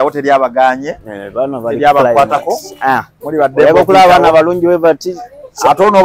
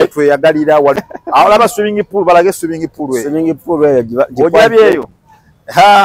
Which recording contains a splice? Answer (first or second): second